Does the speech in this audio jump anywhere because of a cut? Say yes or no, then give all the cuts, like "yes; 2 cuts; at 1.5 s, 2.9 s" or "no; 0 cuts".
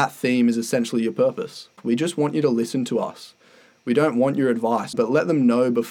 yes; 2 cuts; at 1.8 s, 5.0 s